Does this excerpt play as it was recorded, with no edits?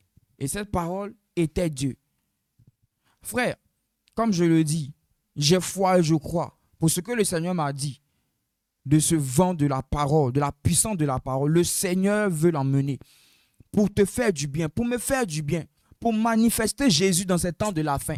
yes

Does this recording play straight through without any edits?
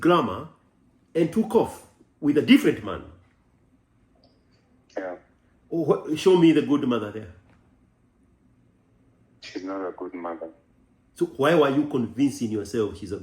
yes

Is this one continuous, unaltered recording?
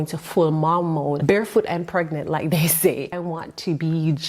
no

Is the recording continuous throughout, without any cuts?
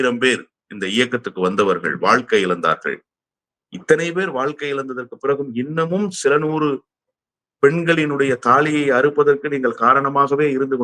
yes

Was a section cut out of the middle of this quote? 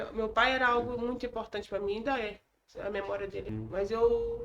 yes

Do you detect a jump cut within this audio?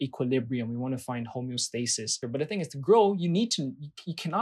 yes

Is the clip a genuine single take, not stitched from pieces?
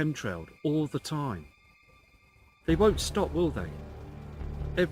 yes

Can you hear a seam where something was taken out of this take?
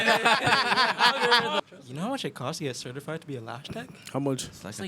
yes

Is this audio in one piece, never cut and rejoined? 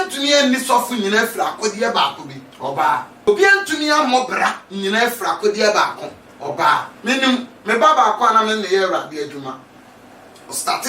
no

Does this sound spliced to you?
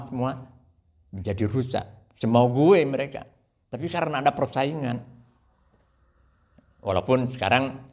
no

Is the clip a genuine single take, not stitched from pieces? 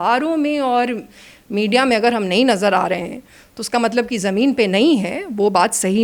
yes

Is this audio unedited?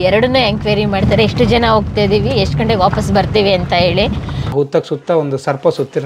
no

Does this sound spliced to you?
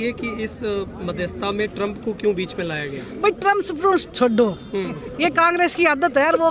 no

